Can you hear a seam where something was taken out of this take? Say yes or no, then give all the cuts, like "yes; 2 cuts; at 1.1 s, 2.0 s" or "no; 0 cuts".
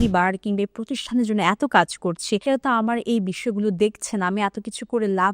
yes; 1 cut; at 2.4 s